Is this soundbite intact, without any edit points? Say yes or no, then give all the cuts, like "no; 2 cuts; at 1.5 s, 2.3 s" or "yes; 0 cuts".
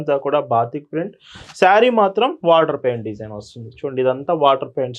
yes; 0 cuts